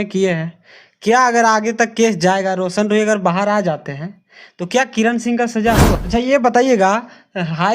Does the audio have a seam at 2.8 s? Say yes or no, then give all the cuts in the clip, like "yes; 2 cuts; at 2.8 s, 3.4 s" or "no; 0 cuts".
no; 1 cut; at 6.0 s